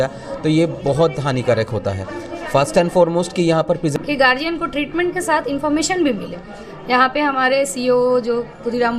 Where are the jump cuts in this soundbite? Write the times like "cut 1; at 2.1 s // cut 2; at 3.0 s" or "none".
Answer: cut 1; at 3.9 s